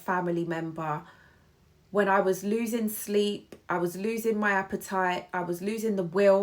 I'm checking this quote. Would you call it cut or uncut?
uncut